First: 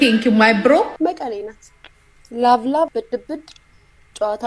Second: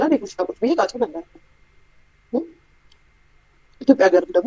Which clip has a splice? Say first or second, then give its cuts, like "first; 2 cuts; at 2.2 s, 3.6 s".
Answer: first; 1 cut; at 0.9 s